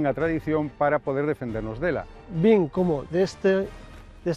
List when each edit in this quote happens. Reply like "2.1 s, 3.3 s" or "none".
2.0 s